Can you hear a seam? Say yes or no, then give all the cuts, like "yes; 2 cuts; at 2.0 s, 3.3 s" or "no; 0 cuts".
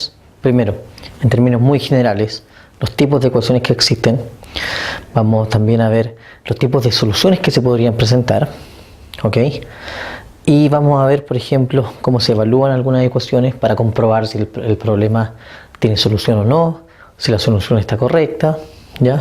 yes; 1 cut; at 13.4 s